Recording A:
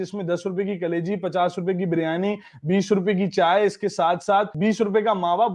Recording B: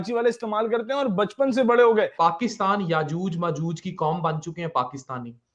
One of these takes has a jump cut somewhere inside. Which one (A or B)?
B